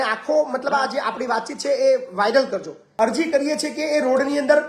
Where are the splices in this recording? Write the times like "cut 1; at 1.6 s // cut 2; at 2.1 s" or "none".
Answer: cut 1; at 2.8 s